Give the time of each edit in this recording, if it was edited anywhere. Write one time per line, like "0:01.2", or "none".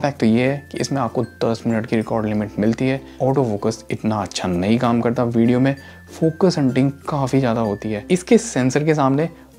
0:03.1
0:07.9